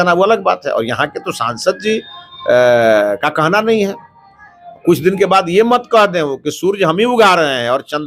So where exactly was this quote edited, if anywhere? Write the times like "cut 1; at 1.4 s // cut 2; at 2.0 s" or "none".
none